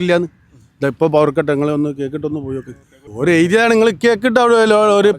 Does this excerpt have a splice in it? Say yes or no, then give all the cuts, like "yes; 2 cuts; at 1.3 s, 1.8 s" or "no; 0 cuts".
yes; 1 cut; at 3.0 s